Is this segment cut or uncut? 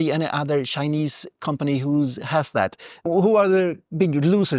cut